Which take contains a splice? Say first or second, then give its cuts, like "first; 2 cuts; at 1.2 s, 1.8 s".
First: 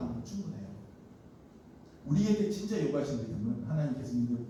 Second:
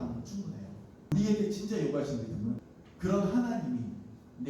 second; 2 cuts; at 1.1 s, 2.6 s